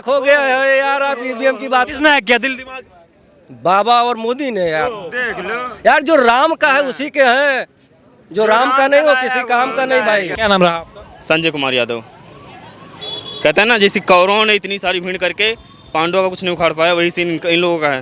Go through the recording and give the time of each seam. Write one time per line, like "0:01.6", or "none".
0:10.3